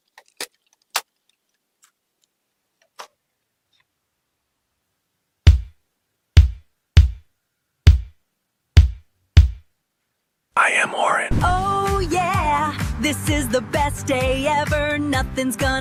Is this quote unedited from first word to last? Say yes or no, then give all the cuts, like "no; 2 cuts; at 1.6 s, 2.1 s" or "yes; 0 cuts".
yes; 0 cuts